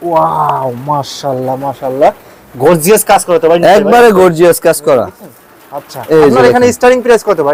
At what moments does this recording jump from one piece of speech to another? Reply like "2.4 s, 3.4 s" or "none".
none

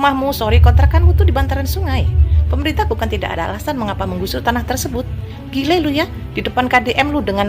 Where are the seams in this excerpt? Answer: none

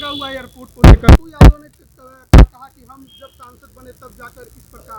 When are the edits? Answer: 1.3 s

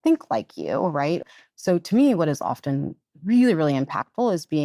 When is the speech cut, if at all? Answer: 1.2 s

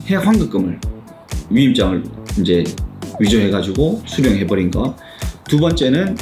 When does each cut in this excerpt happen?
none

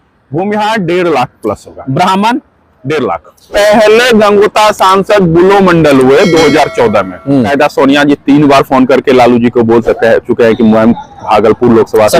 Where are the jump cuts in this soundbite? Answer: 3.5 s, 7.5 s

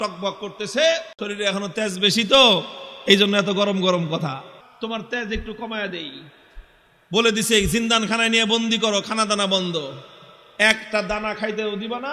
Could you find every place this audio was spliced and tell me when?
1.1 s, 4.6 s

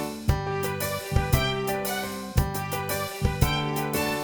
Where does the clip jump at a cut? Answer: none

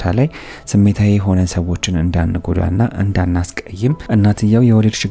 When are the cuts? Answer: 4.0 s

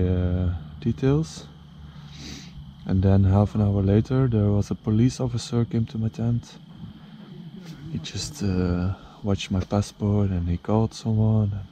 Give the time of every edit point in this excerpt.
none

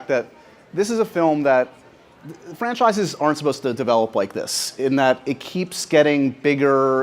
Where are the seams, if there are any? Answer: 4.9 s

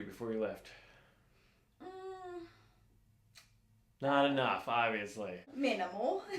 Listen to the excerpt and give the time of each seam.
5.5 s

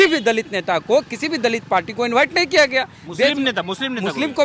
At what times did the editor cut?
none

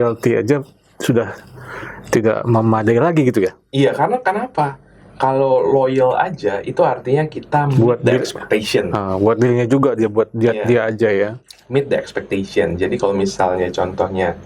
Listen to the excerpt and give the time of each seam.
none

